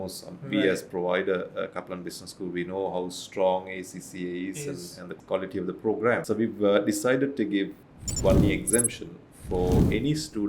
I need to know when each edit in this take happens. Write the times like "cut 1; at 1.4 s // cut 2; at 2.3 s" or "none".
cut 1; at 5.0 s // cut 2; at 6.2 s // cut 3; at 7.8 s